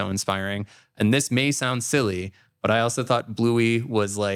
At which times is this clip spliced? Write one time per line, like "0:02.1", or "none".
none